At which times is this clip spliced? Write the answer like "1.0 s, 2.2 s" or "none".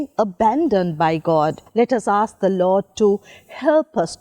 1.6 s